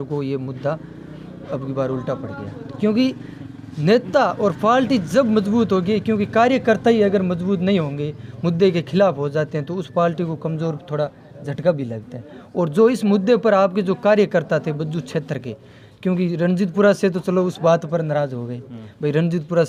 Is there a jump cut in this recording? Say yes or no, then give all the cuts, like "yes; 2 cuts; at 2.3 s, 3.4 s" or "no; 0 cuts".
no; 0 cuts